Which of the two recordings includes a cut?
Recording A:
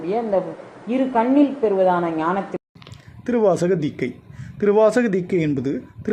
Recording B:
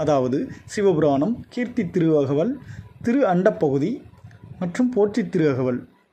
A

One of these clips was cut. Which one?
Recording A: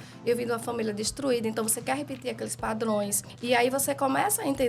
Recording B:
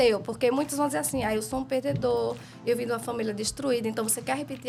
A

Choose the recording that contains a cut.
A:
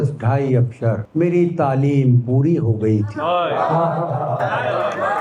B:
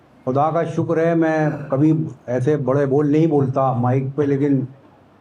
A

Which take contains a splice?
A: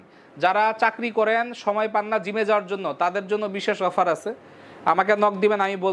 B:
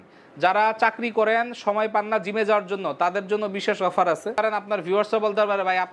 B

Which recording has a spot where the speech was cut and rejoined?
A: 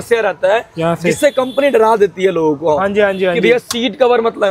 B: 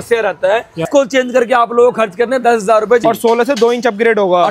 B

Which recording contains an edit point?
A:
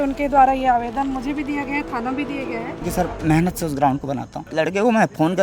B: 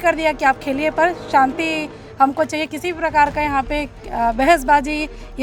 A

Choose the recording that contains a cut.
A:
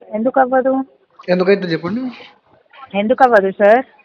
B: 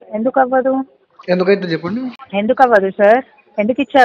B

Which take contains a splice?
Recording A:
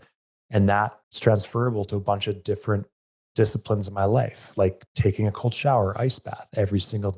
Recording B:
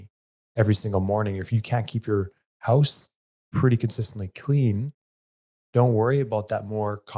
A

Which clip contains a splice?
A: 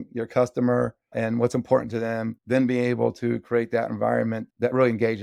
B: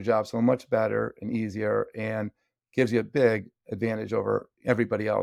A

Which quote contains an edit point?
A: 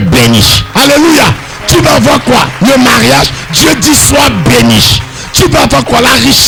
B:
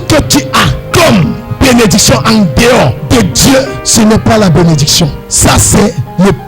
B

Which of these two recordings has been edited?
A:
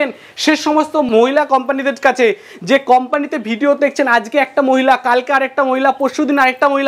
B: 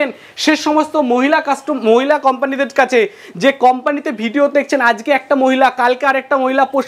A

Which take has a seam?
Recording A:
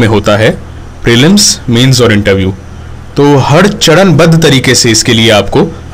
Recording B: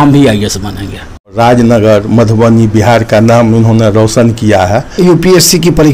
B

